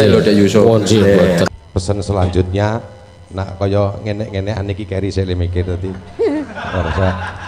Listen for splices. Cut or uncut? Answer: cut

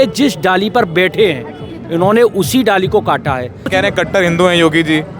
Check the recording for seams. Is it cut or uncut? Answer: cut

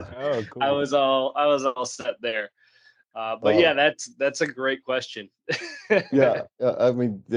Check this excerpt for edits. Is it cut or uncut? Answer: uncut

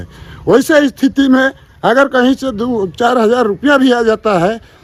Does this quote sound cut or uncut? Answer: uncut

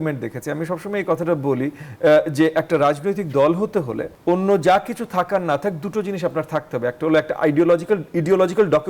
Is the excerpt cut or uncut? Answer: cut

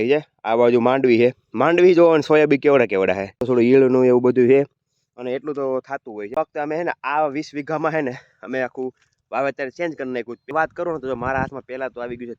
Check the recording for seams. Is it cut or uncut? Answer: cut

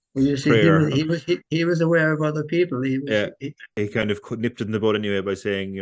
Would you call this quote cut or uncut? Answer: cut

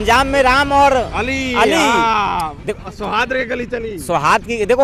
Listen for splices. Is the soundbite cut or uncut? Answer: uncut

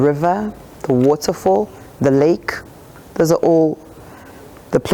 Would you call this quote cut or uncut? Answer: uncut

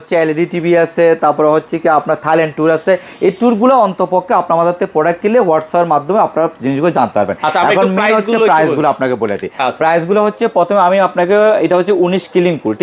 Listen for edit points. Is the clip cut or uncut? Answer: uncut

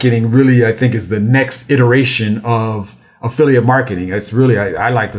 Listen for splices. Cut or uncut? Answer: uncut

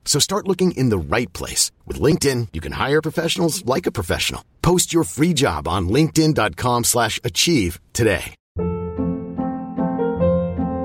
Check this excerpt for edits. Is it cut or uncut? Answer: uncut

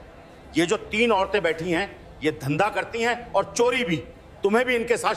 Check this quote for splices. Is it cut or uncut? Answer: uncut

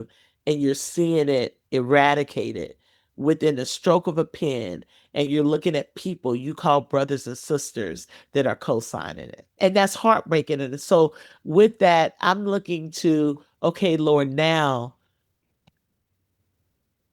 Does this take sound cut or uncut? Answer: cut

